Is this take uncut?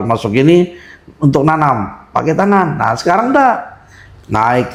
yes; 0 cuts

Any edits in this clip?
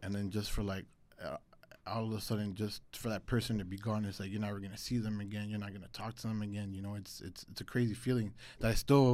no; 0 cuts

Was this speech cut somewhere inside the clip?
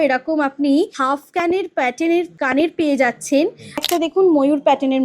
yes; 3 cuts; at 1.0 s, 2.3 s, 3.8 s

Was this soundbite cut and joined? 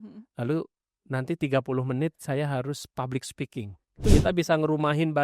yes; 1 cut; at 4.0 s

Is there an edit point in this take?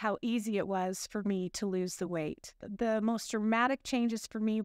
yes; 1 cut; at 2.6 s

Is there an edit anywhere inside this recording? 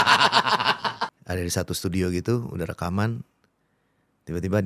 yes; 1 cut; at 1.1 s

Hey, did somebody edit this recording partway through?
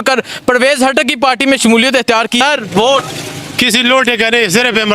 yes; 1 cut; at 2.4 s

